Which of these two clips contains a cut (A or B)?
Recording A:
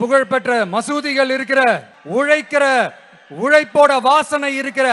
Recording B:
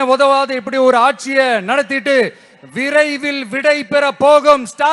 A